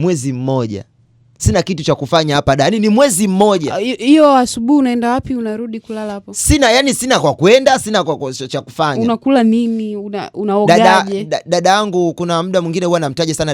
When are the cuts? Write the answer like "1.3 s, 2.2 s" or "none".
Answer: none